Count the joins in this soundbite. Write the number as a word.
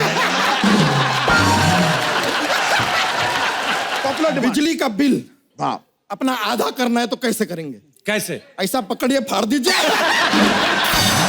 one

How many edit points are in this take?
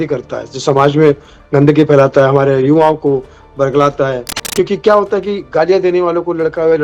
one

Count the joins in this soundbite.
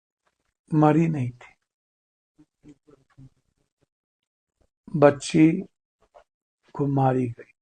zero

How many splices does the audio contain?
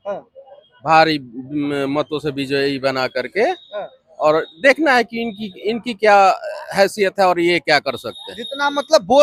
zero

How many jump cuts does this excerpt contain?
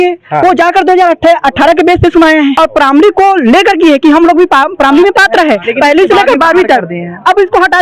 one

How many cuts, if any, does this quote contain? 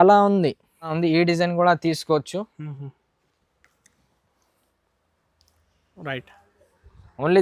one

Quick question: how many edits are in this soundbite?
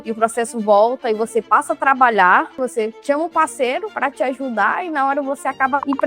one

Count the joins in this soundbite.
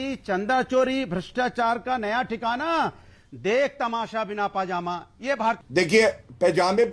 one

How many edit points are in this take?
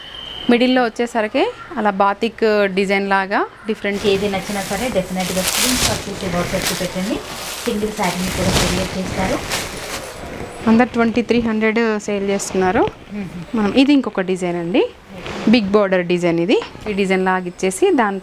three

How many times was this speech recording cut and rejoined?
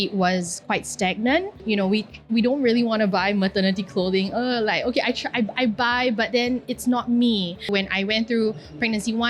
two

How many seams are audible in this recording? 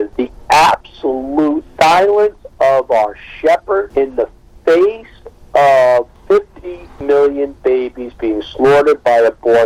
zero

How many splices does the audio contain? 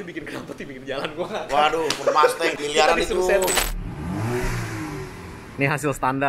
two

